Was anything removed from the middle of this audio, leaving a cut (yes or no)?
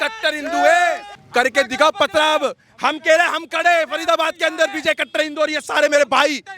yes